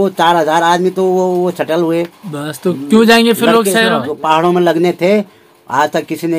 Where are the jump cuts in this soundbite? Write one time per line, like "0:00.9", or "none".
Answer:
0:04.0